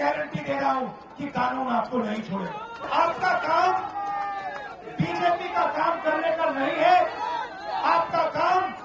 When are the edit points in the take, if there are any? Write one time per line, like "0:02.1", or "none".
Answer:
0:02.9